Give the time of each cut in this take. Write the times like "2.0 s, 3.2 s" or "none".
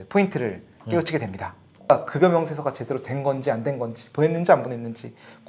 1.9 s